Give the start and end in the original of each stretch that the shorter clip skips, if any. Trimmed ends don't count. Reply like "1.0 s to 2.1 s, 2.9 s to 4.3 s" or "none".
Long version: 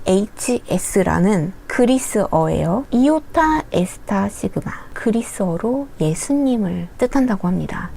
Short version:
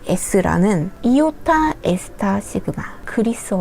1.6 s to 2.9 s